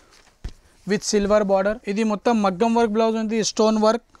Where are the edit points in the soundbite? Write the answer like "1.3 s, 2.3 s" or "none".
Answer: 1.8 s